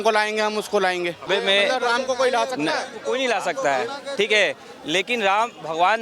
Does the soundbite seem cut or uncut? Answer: cut